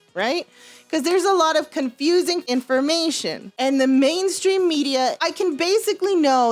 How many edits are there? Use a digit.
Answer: 3